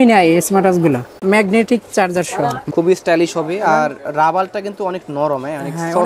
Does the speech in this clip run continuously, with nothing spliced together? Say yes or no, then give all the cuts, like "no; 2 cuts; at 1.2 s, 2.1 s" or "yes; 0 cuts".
no; 2 cuts; at 1.2 s, 2.7 s